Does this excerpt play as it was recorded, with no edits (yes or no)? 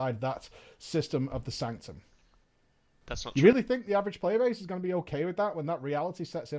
yes